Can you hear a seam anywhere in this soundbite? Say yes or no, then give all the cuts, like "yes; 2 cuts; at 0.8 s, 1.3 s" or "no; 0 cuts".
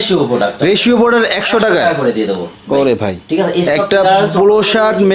no; 0 cuts